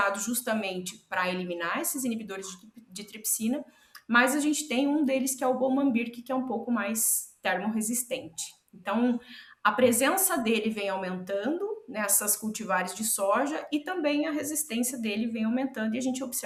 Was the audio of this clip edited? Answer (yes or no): no